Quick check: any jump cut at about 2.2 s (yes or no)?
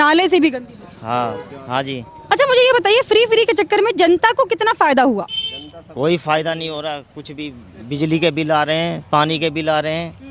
yes